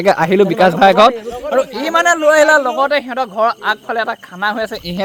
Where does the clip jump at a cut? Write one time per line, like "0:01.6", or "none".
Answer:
none